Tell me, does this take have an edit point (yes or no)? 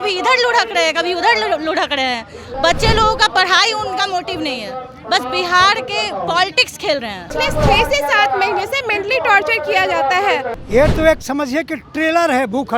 yes